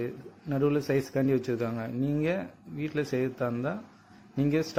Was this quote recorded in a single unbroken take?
yes; 0 cuts

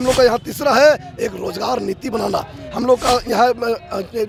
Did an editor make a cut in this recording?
no; 0 cuts

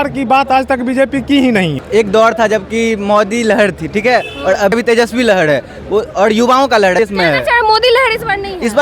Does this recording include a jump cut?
yes; 3 cuts; at 1.8 s, 4.7 s, 7.0 s

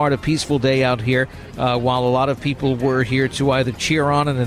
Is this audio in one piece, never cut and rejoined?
yes; 0 cuts

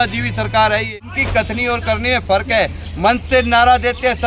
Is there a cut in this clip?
yes; 1 cut; at 1.0 s

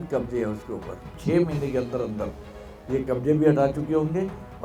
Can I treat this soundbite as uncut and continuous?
no; 1 cut; at 1.1 s

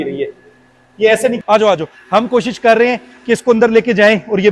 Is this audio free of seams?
no; 1 cut; at 1.4 s

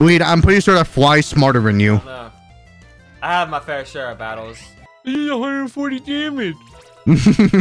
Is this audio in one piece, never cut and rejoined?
no; 1 cut; at 5.2 s

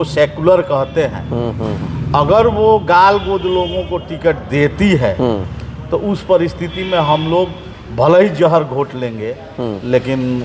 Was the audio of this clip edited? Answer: no; 0 cuts

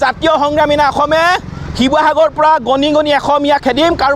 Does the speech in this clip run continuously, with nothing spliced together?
yes; 0 cuts

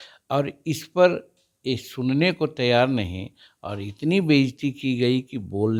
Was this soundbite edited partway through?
no; 0 cuts

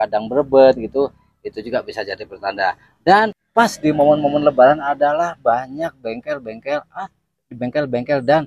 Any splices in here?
yes; 1 cut; at 3.4 s

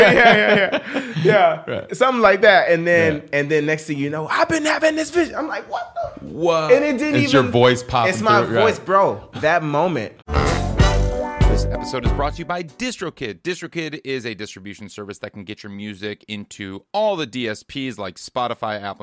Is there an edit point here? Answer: yes; 2 cuts; at 9.2 s, 10.2 s

